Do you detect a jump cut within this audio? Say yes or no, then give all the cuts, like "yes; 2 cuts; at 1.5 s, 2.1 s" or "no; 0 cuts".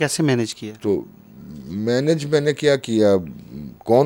no; 0 cuts